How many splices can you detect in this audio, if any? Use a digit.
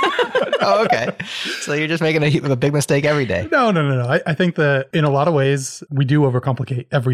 2